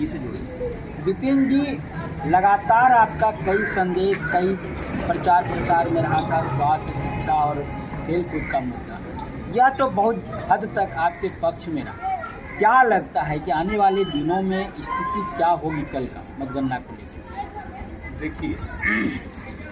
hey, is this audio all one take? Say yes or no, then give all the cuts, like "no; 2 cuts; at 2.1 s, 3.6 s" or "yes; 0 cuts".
yes; 0 cuts